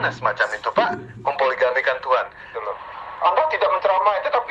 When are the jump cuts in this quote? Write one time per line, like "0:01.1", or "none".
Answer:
0:02.5

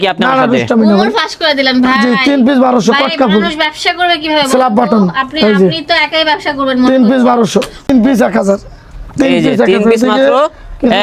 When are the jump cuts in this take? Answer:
0:07.9

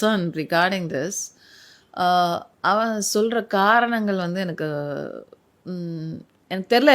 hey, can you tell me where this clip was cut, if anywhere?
none

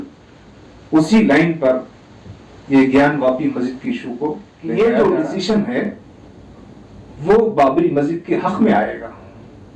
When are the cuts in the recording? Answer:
0:04.5

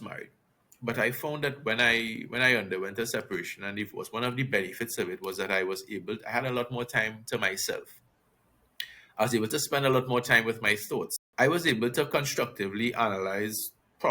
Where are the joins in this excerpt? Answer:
0:11.2

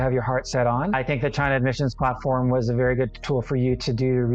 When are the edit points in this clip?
0:01.0

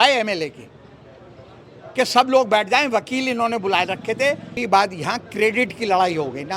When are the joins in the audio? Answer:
0:04.6

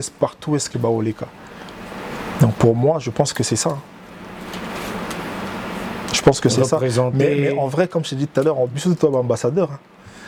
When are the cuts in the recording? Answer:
none

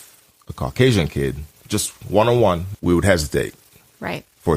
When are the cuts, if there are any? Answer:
0:02.7

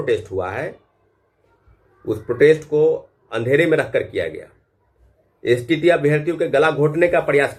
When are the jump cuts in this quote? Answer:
none

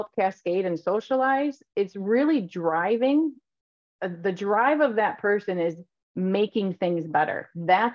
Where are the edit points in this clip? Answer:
none

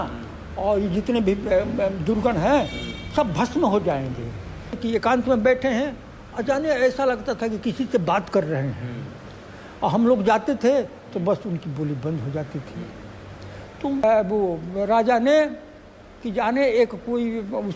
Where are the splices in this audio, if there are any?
0:04.8
0:14.0

